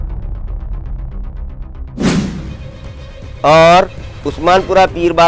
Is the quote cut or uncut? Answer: cut